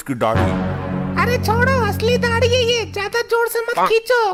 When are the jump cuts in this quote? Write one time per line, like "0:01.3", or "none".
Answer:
none